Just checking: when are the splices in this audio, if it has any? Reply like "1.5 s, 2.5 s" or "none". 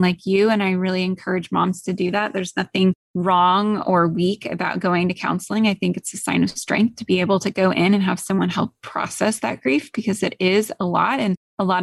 3.1 s